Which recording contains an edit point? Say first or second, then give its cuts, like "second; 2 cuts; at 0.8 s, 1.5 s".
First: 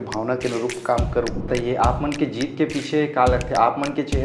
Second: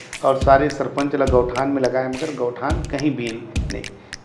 first; 1 cut; at 1.5 s